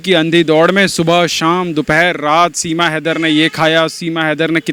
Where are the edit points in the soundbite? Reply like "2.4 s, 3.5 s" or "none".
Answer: none